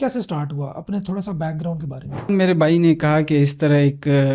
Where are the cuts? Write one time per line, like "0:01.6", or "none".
0:02.3